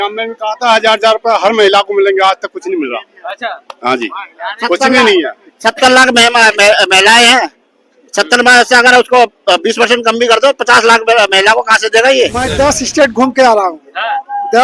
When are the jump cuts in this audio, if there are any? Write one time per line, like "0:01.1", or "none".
0:12.5